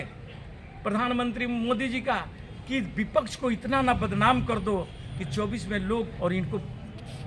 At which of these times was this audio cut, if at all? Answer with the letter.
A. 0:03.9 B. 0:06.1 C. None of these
B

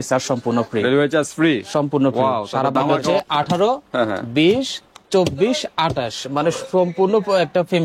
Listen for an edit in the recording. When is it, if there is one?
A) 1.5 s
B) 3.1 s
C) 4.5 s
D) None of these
B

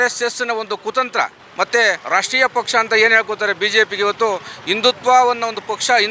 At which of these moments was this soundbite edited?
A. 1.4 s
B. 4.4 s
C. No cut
A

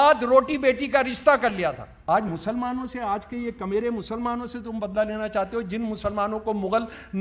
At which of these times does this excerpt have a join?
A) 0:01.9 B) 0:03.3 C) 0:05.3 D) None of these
A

